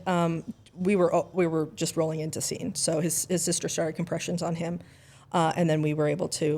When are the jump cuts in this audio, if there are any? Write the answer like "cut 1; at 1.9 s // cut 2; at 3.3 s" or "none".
none